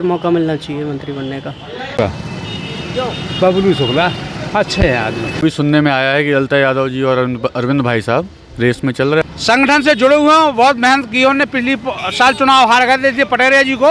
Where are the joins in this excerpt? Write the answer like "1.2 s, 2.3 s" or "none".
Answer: 1.9 s, 5.4 s, 9.2 s